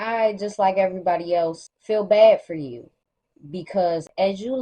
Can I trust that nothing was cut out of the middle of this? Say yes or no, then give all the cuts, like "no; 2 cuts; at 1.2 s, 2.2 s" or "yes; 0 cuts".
no; 1 cut; at 1.7 s